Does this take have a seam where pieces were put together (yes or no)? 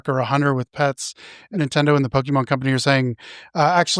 yes